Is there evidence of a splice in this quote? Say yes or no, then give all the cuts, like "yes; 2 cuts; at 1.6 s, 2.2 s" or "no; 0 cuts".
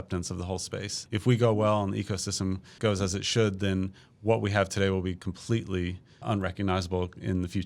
yes; 3 cuts; at 1.0 s, 2.7 s, 6.2 s